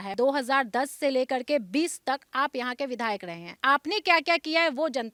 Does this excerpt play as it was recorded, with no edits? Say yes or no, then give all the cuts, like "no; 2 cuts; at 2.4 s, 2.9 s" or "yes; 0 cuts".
yes; 0 cuts